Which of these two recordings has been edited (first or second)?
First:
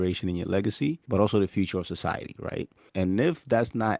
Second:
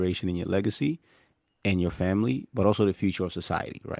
first